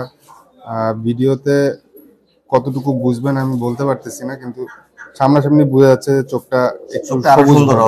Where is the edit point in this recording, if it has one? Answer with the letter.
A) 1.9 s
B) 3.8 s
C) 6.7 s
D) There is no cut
D